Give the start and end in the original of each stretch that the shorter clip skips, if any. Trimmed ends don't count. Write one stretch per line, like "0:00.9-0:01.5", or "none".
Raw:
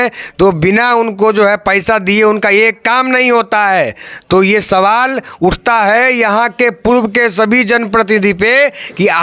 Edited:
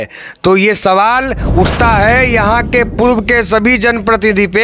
none